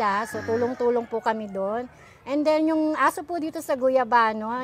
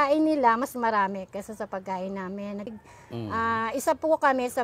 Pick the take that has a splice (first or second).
second